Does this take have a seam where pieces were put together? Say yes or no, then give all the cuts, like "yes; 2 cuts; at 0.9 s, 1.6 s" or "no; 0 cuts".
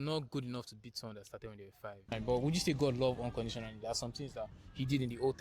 yes; 1 cut; at 2.1 s